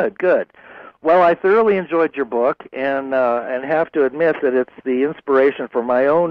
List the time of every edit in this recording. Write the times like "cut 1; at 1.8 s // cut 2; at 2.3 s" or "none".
cut 1; at 2.8 s